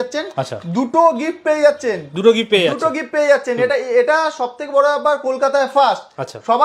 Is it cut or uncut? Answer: uncut